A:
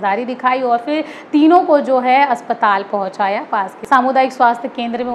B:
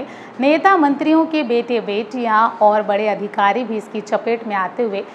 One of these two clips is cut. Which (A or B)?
A